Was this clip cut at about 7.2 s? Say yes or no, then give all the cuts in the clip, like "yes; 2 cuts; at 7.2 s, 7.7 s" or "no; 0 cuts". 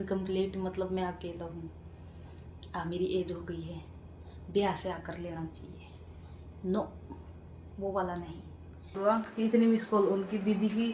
no; 1 cut; at 9.1 s